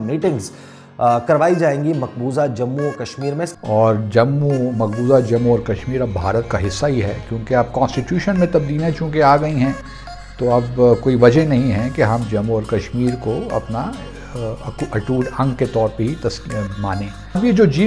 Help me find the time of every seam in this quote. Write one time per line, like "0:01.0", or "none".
0:03.6